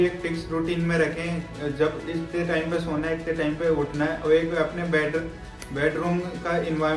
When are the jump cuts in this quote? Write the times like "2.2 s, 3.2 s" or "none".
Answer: none